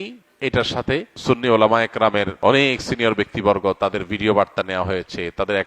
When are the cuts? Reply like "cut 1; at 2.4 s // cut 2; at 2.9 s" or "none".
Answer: cut 1; at 1.1 s // cut 2; at 2.3 s